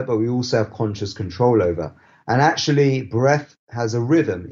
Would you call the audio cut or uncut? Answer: uncut